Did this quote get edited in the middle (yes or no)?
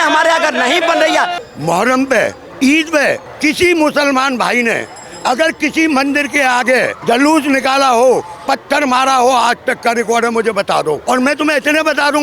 yes